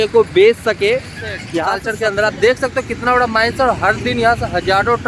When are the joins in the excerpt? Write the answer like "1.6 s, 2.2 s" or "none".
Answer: 1.7 s